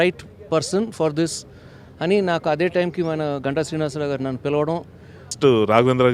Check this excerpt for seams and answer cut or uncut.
cut